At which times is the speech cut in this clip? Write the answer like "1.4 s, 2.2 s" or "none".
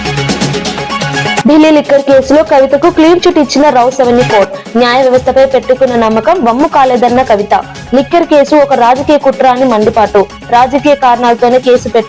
1.1 s